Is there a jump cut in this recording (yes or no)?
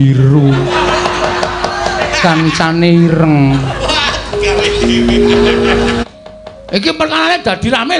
yes